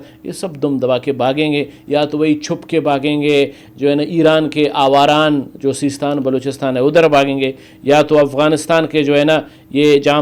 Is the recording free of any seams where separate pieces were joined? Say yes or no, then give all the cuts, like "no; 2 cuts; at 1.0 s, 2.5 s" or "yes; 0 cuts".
yes; 0 cuts